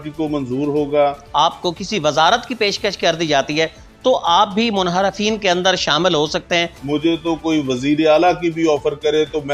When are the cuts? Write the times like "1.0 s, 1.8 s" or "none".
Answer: 1.2 s, 6.8 s